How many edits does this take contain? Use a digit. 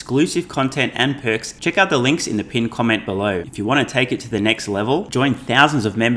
2